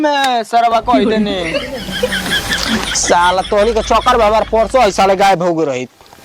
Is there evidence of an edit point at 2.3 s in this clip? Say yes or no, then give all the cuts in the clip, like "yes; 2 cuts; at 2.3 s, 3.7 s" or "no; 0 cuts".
no; 0 cuts